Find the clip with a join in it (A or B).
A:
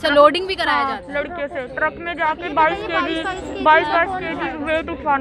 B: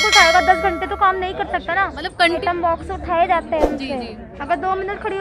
B